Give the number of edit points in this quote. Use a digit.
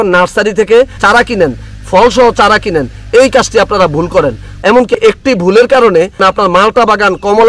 2